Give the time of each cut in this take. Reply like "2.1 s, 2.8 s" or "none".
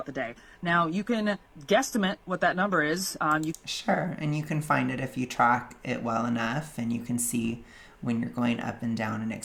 none